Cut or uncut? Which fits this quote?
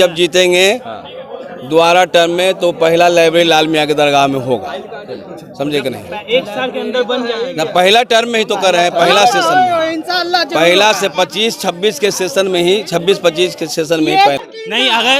uncut